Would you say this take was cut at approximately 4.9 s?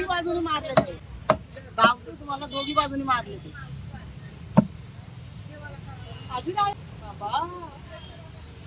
no; 2 cuts; at 1.0 s, 6.7 s

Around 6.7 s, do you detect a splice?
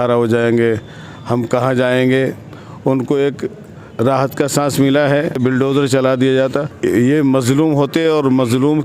yes; 2 cuts; at 5.4 s, 6.7 s

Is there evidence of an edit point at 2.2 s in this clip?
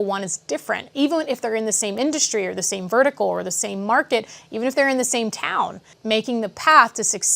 no; 1 cut; at 5.8 s

